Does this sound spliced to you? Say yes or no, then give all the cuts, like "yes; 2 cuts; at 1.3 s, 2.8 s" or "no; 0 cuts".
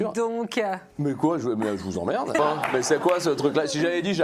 yes; 2 cuts; at 0.9 s, 2.4 s